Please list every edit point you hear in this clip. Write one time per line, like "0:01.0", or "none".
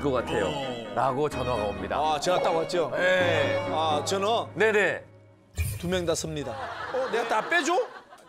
0:06.8